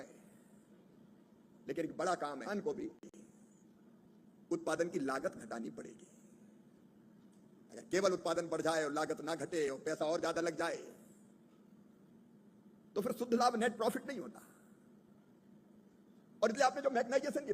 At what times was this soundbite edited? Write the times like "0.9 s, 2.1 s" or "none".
2.4 s